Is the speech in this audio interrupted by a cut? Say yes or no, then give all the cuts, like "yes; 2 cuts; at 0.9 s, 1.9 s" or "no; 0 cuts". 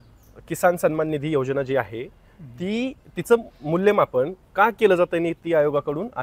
no; 0 cuts